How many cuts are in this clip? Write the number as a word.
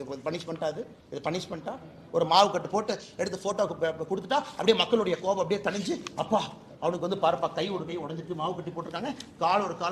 zero